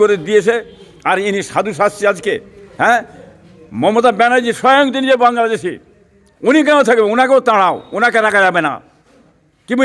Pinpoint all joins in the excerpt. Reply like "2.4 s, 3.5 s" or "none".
none